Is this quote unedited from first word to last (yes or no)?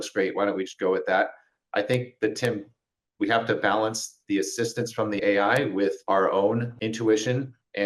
no